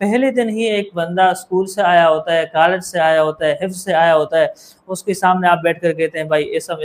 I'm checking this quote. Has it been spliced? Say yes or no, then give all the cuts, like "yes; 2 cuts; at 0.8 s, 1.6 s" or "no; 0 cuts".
no; 0 cuts